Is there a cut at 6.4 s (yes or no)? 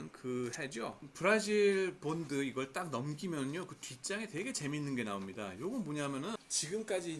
yes